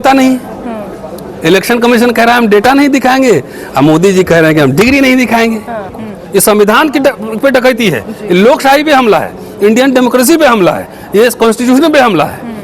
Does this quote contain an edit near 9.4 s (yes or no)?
no